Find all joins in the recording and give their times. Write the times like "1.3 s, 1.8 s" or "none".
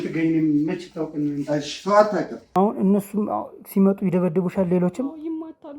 2.4 s